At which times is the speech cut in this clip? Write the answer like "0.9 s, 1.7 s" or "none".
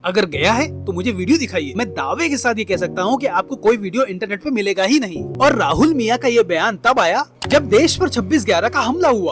5.2 s

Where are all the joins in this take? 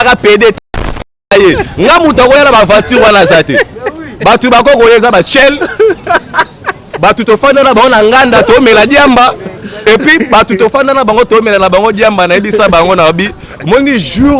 none

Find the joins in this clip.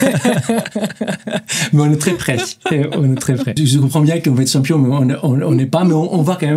3.6 s

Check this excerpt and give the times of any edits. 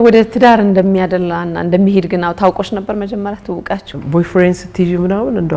3.9 s

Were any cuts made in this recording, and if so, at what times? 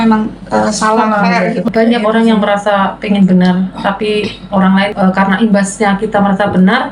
1.7 s, 4.9 s

